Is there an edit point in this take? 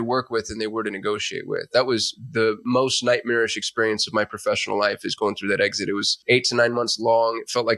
yes; 2 cuts; at 2.6 s, 6.1 s

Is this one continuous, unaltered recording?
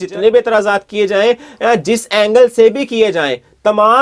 yes; 0 cuts

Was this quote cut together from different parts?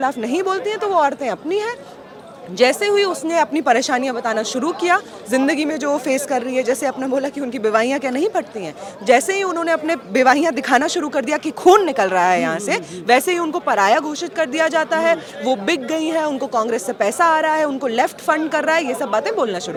no; 0 cuts

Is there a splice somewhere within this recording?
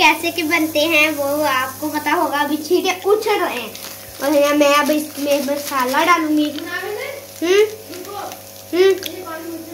no; 0 cuts

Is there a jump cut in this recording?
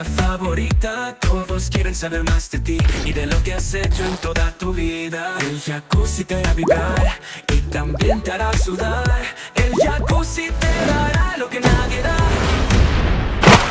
no; 0 cuts

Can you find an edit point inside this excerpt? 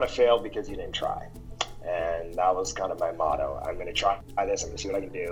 yes; 1 cut; at 4.3 s

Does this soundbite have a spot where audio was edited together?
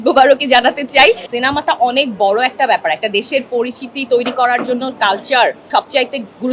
yes; 2 cuts; at 1.3 s, 5.6 s

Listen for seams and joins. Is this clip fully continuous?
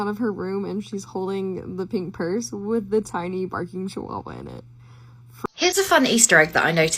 no; 1 cut; at 5.3 s

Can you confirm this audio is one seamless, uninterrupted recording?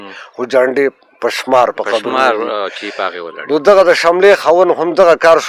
yes; 0 cuts

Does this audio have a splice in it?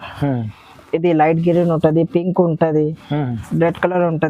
no; 0 cuts

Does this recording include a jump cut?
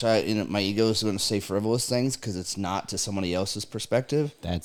no; 0 cuts

